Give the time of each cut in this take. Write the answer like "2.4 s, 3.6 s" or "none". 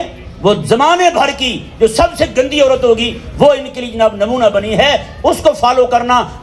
none